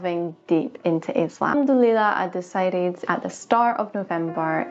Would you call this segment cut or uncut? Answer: cut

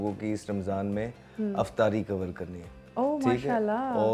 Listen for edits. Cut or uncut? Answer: uncut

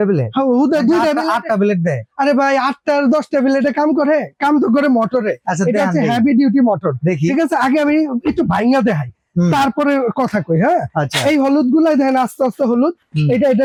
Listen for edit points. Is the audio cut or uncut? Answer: uncut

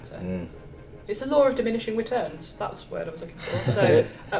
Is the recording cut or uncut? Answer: uncut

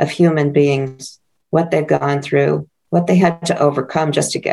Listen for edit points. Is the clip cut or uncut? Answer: cut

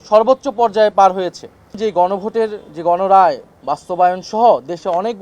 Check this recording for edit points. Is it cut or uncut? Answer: cut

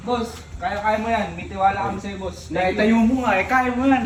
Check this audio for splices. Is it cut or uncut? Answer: uncut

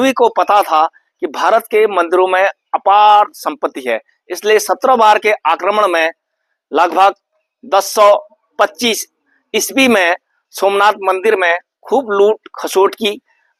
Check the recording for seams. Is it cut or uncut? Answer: uncut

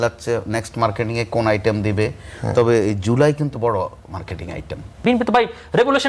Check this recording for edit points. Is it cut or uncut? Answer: cut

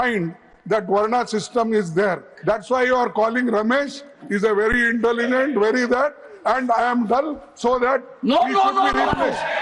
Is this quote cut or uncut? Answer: uncut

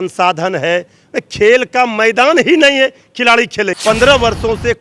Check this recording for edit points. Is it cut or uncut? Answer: cut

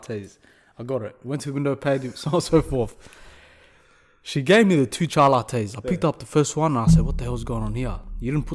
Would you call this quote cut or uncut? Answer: uncut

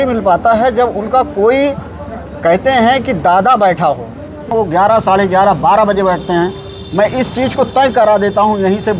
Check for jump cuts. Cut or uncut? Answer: cut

